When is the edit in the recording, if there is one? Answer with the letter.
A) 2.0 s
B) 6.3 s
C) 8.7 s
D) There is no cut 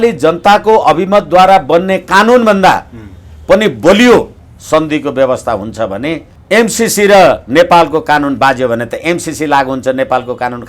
B